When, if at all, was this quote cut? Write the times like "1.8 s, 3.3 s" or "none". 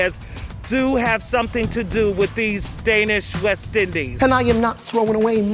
4.1 s

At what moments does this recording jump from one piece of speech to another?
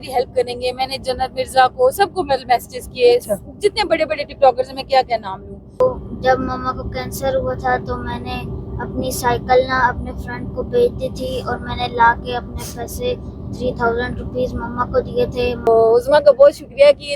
5.7 s, 15.7 s

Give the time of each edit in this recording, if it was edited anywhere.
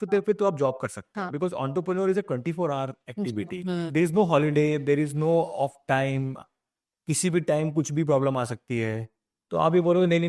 3.9 s

